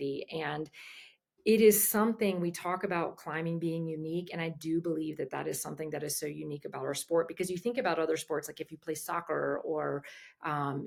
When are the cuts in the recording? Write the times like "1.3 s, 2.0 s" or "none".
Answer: none